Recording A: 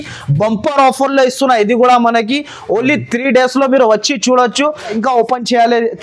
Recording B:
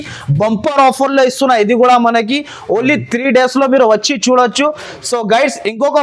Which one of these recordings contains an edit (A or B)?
A